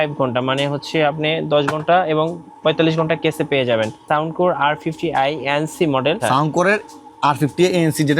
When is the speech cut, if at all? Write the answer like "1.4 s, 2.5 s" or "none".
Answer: 4.0 s, 6.2 s